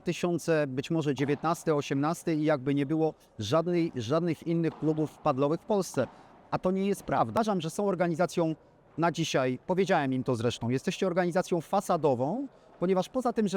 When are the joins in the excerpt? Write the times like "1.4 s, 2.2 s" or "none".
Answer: 7.4 s